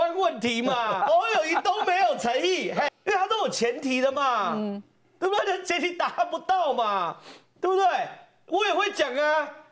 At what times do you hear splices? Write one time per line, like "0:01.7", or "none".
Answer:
0:01.0
0:02.9